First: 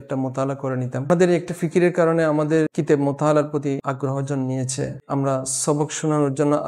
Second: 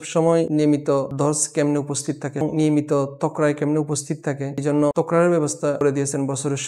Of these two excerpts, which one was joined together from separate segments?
first; 3 cuts; at 1.0 s, 2.7 s, 3.8 s

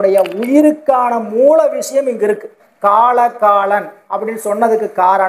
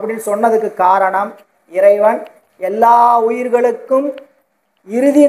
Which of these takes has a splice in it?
first; 1 cut; at 2.6 s

